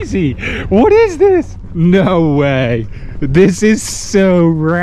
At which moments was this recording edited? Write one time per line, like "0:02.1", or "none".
0:01.6

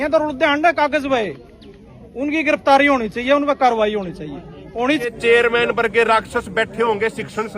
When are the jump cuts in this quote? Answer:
0:05.1

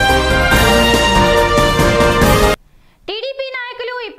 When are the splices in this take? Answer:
none

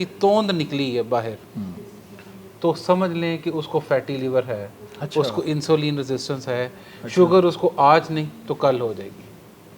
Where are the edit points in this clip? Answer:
none

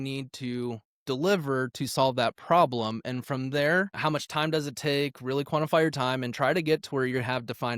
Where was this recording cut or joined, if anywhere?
none

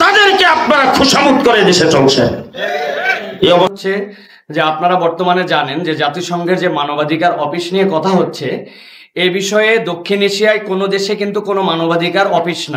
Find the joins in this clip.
0:03.8

